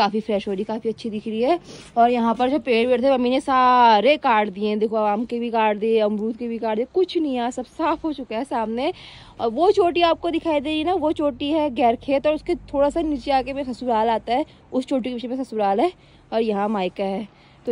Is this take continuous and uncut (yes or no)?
yes